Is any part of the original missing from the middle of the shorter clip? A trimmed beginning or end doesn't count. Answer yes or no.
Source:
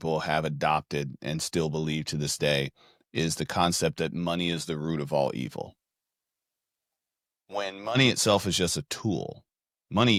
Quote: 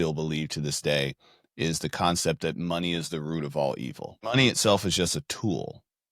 yes